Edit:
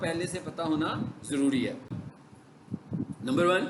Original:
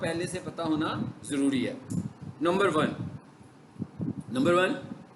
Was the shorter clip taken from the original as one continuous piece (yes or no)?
no